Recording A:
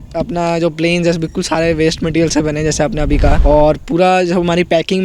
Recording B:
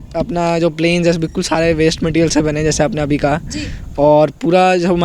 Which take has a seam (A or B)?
A